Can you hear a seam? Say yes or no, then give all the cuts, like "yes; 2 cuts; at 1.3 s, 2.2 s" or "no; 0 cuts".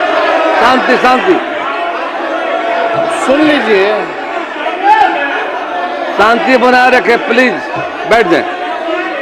no; 0 cuts